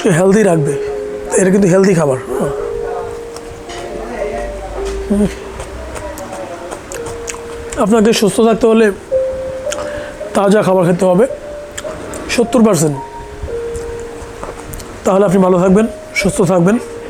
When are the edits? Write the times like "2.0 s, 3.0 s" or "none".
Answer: none